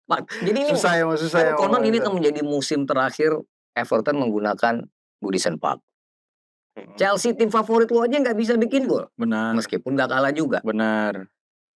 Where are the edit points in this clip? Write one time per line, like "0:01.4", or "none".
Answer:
none